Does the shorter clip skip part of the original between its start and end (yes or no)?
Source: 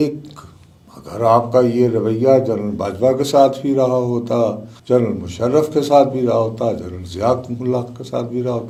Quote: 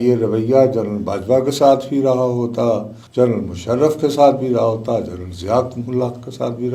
no